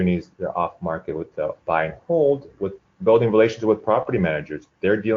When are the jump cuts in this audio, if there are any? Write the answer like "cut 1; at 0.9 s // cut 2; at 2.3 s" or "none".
cut 1; at 1.3 s